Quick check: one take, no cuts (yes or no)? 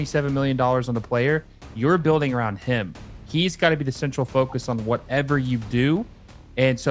yes